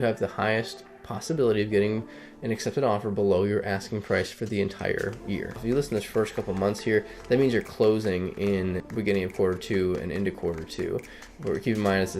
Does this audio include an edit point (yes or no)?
yes